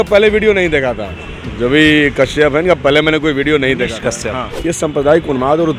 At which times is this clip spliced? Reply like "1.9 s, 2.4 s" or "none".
4.5 s

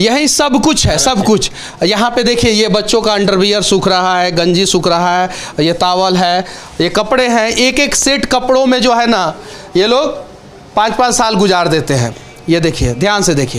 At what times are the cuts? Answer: none

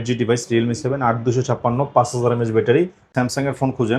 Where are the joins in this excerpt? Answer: 3.1 s

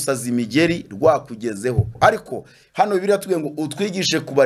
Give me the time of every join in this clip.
1.9 s

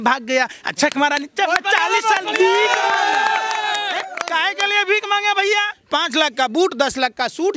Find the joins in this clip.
5.8 s

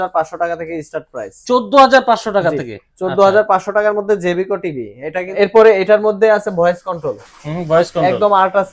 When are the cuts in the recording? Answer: 5.3 s

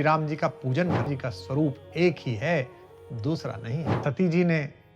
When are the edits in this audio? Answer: 1.1 s, 3.9 s

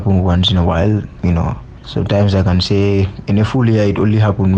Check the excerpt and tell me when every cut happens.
1.3 s

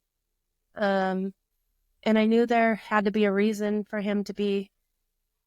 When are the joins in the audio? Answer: none

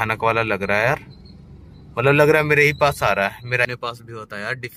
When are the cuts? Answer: 3.6 s

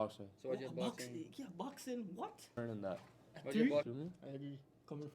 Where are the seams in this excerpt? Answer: 2.6 s, 3.2 s, 3.9 s

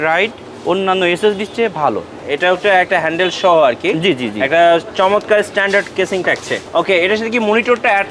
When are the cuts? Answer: 2.1 s, 6.6 s

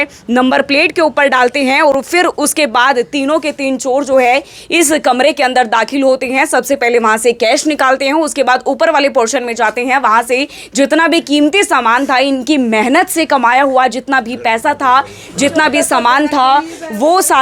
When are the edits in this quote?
none

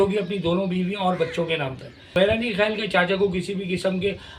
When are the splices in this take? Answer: 2.1 s

